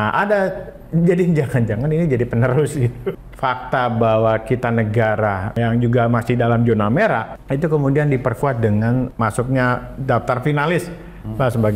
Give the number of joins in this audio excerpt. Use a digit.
4